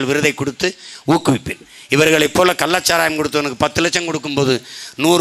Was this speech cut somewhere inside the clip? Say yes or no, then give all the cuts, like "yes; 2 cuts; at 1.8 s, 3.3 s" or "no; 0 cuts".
no; 0 cuts